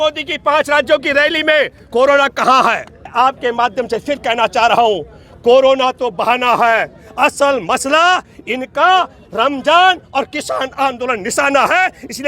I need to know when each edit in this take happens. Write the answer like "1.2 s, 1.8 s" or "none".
3.0 s